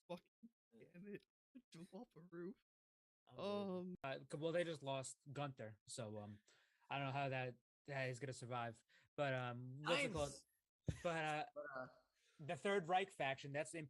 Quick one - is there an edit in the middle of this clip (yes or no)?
yes